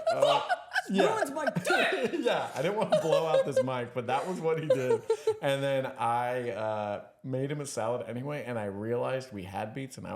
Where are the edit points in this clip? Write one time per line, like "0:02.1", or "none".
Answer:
none